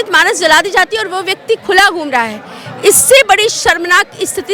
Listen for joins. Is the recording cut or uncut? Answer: uncut